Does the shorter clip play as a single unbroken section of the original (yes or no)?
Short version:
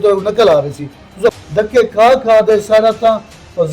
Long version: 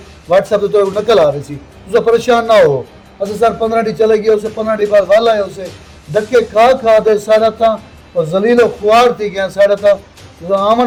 no